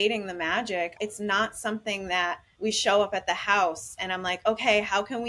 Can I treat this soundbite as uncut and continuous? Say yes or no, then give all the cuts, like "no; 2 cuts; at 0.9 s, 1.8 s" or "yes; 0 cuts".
no; 2 cuts; at 0.9 s, 2.5 s